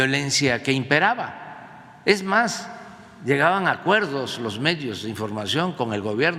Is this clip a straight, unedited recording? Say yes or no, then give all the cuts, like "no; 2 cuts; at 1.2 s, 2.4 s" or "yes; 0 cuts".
yes; 0 cuts